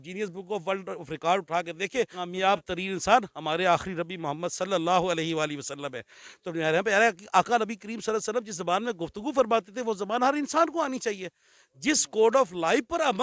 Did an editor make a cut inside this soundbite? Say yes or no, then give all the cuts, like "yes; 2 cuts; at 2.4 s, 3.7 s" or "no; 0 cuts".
yes; 1 cut; at 2.2 s